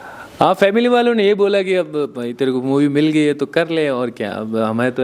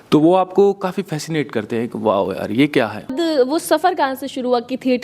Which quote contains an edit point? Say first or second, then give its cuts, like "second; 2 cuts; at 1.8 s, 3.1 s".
second; 1 cut; at 3.1 s